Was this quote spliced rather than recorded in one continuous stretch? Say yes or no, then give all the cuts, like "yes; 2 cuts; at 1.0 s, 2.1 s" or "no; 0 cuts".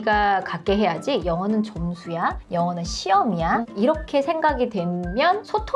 no; 0 cuts